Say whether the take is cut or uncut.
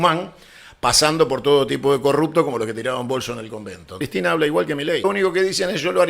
cut